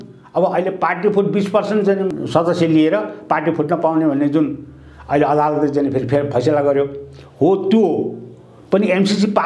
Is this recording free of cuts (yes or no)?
yes